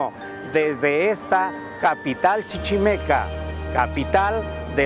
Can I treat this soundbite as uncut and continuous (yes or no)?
yes